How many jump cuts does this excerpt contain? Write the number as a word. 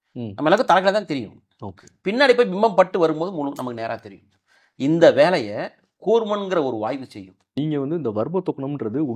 one